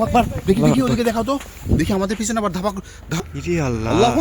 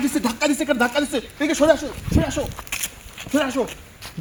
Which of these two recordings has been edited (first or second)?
first